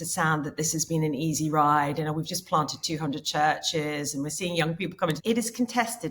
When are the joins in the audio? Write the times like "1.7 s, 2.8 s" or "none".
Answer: 5.2 s

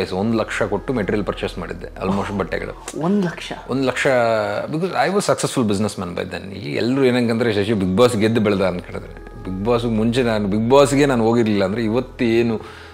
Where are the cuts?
none

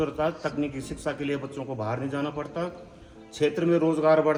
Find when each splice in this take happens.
none

